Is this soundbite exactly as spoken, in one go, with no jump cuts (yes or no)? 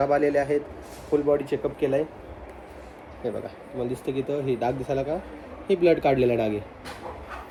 yes